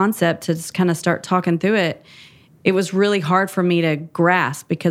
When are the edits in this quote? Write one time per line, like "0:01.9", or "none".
none